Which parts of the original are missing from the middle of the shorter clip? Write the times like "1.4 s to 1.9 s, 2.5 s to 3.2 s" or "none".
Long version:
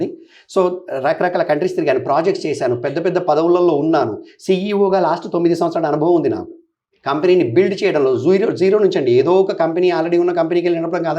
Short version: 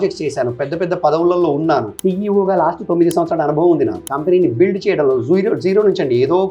4.2 s to 4.4 s, 6.5 s to 7.0 s